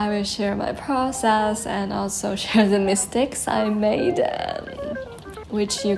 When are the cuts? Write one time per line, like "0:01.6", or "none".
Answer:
none

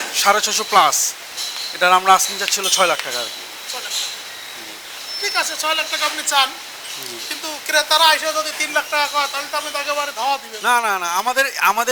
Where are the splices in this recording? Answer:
none

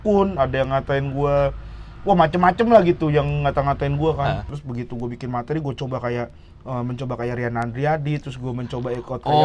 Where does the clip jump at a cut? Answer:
0:04.5

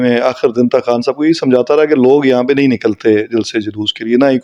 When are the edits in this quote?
none

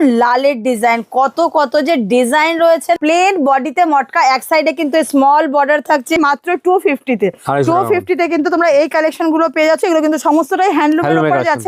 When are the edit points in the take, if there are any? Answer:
0:03.0
0:06.2
0:09.8

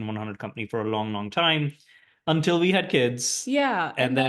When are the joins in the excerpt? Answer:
none

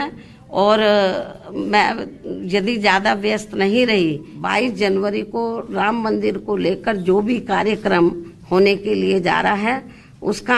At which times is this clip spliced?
0:04.3

